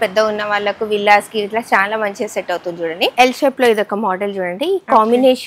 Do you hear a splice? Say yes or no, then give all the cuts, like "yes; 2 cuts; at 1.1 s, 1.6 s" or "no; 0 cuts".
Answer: yes; 1 cut; at 3.1 s